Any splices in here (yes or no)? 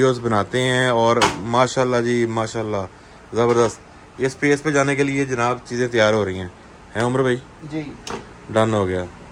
no